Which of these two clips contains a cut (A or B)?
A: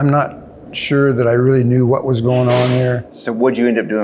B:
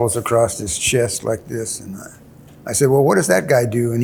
A